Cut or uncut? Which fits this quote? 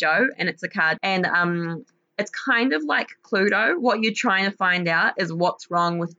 cut